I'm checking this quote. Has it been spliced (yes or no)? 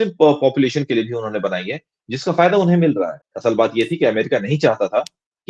yes